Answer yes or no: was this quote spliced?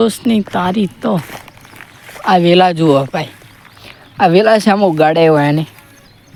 no